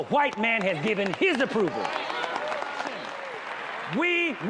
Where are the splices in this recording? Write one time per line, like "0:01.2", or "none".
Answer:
0:03.2